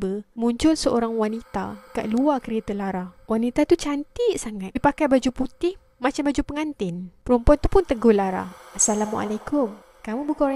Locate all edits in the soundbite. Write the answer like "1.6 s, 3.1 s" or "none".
4.7 s